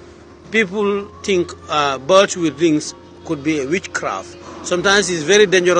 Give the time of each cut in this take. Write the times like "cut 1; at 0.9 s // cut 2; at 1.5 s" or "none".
cut 1; at 1.1 s // cut 2; at 4.5 s